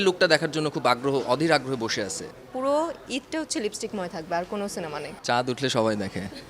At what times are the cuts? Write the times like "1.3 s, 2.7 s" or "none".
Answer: 2.3 s, 5.1 s